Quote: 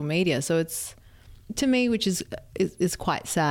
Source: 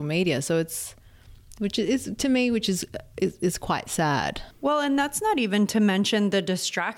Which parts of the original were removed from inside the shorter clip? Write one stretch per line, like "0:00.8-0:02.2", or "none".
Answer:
0:01.5-0:02.1